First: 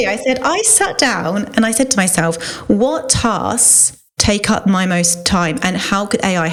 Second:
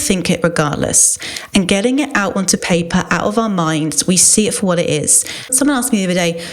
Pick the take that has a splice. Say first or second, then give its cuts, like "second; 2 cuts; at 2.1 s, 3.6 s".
second; 1 cut; at 5.5 s